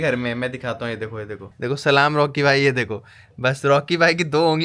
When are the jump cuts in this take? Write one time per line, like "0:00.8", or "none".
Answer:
0:01.5